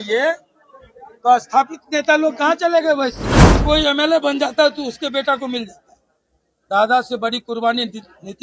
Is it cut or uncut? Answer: cut